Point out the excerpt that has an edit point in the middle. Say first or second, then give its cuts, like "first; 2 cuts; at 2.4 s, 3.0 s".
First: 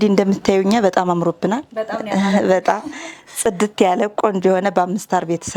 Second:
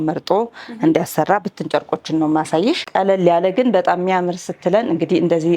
second; 1 cut; at 2.8 s